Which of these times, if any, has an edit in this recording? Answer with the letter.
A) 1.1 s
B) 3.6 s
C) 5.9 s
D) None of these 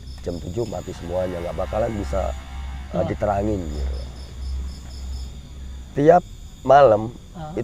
C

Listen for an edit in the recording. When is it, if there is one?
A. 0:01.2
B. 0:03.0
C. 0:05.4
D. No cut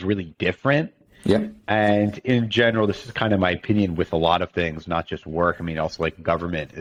D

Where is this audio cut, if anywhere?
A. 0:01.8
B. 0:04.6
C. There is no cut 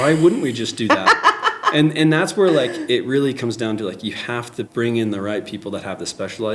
B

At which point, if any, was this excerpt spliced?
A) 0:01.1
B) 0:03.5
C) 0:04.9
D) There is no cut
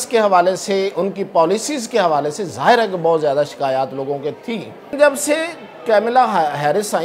C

